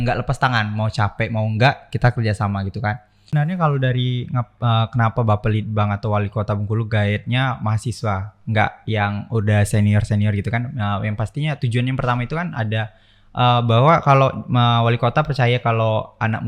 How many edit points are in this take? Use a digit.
1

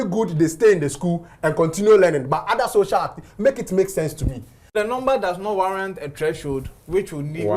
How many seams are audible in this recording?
1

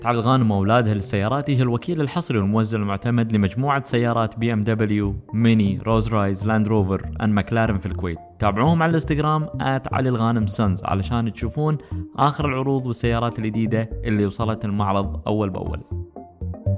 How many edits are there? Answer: 1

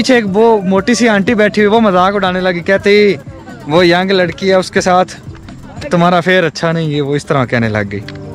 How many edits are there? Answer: 0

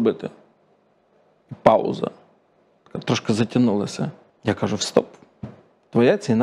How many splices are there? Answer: 1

